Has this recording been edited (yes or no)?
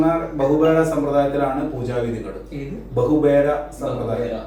no